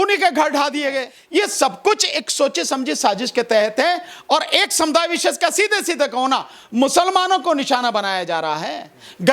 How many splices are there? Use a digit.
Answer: 1